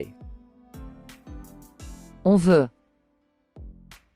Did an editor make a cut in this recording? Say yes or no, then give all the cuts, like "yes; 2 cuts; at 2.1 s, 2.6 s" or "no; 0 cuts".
yes; 1 cut; at 2.8 s